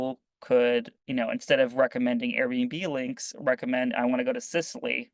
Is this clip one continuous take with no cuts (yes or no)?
no